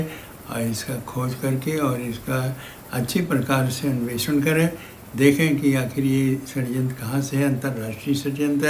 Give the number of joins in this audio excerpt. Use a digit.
0